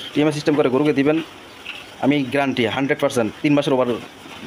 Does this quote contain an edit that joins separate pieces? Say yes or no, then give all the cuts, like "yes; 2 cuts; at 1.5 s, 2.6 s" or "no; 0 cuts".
no; 0 cuts